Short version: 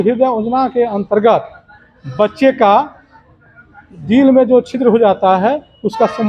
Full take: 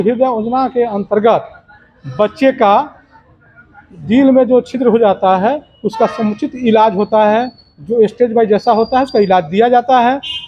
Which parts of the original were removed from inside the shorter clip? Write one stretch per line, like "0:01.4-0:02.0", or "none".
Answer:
none